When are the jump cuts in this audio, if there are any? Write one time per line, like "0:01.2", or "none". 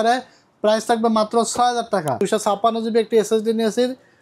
0:02.2